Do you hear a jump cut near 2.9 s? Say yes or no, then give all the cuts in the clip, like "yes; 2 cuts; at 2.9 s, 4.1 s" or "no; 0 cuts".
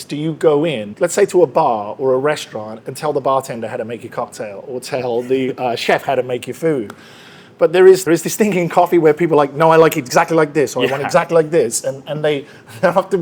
no; 2 cuts; at 0.9 s, 8.0 s